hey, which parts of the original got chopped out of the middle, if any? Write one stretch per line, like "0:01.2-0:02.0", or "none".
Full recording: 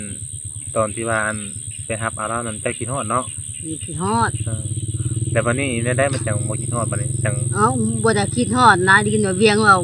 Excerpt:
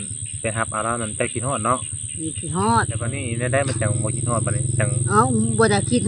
0:04.7-0:05.7